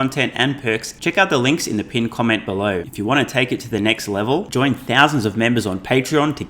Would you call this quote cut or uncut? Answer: cut